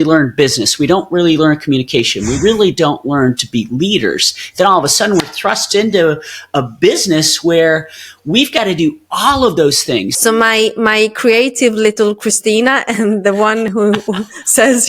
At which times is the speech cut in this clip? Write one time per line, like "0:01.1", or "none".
0:10.1